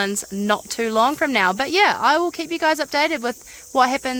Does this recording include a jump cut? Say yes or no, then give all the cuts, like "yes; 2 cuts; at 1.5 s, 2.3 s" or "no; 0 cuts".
no; 0 cuts